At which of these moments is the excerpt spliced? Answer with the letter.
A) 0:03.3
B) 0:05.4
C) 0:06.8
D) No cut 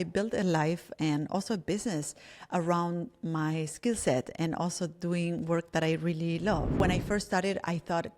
C